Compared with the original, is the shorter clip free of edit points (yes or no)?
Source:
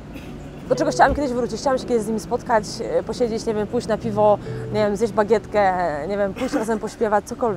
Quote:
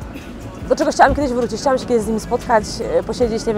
yes